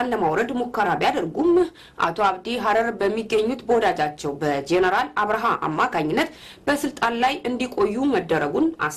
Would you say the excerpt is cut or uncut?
uncut